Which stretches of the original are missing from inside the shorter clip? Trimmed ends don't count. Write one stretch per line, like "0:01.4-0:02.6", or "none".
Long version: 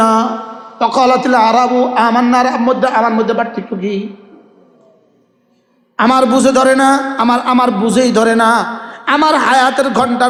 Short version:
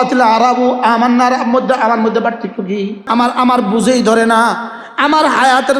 0:04.2-0:07.1